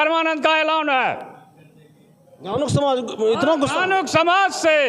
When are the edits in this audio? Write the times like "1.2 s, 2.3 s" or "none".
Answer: none